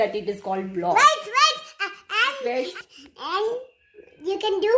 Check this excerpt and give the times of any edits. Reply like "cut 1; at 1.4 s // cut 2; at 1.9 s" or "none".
cut 1; at 2.7 s